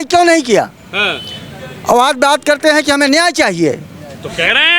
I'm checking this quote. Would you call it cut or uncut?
uncut